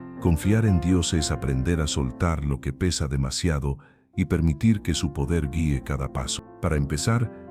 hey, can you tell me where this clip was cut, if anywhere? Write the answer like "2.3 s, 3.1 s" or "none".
6.4 s